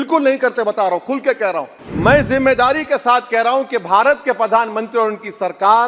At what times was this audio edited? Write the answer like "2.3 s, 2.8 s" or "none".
1.8 s